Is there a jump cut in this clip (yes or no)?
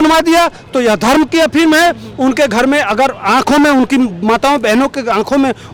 no